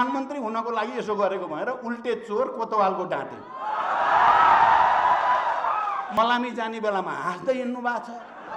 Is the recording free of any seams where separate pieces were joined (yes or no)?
no